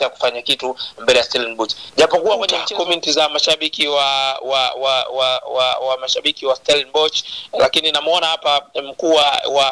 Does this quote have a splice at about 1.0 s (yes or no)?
no